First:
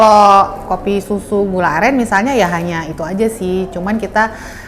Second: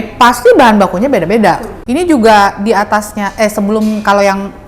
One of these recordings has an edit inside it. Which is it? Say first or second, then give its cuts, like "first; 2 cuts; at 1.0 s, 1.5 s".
second; 1 cut; at 1.7 s